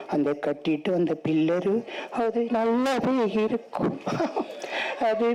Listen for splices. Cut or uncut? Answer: uncut